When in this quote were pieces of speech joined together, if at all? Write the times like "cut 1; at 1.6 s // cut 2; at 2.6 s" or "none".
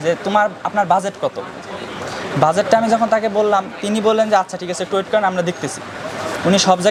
none